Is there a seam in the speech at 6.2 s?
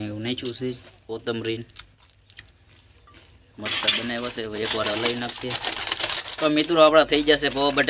yes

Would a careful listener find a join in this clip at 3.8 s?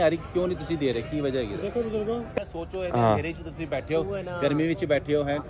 no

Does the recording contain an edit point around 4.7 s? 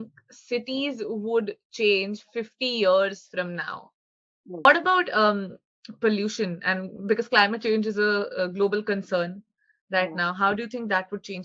yes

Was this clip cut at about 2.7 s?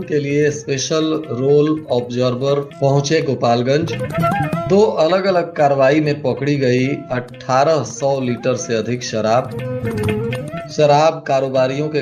no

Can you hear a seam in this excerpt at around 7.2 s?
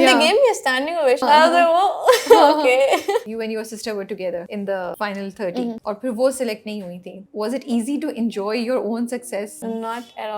yes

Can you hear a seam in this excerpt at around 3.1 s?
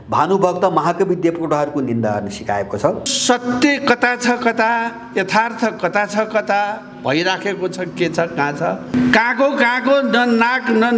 yes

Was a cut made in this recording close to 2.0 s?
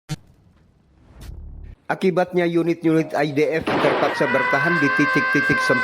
yes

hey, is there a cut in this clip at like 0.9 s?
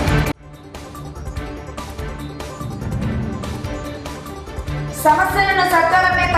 no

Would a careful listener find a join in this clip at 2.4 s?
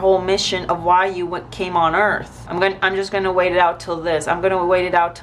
yes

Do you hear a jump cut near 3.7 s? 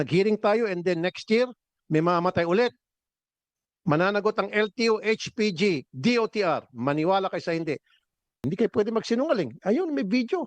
no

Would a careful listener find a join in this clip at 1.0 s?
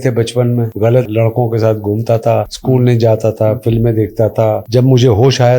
yes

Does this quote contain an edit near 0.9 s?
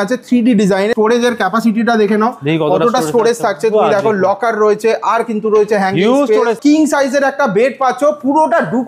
yes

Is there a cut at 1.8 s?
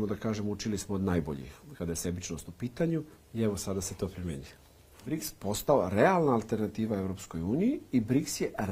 no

